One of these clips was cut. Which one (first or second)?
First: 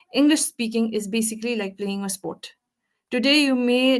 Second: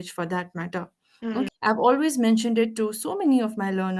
second